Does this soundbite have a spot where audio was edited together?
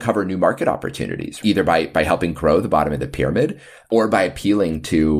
yes; 2 cuts; at 1.4 s, 3.9 s

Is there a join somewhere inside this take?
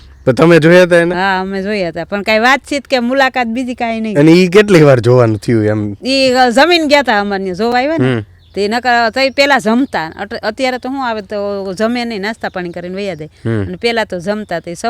no; 0 cuts

